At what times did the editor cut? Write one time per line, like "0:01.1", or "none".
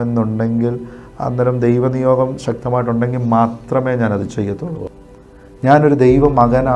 0:04.9